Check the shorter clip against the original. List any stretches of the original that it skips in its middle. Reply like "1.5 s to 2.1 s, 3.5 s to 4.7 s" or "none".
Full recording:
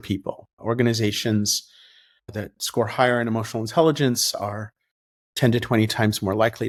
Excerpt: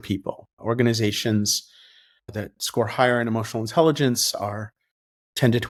none